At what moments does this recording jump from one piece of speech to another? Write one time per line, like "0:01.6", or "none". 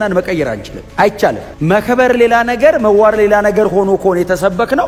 none